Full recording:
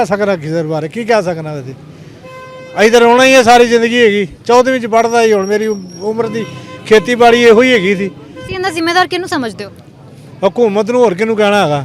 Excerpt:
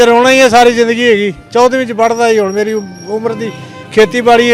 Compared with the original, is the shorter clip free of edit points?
yes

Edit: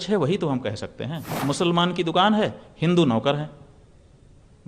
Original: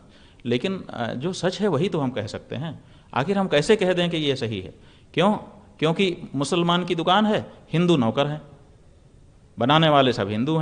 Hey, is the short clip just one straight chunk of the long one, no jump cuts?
no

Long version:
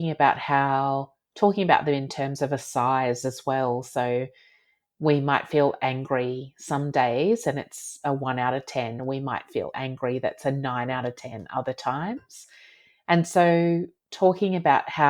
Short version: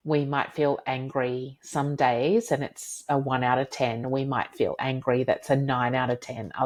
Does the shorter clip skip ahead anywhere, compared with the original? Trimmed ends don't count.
no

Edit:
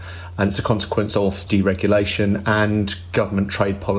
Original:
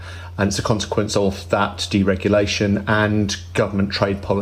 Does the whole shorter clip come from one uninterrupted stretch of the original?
no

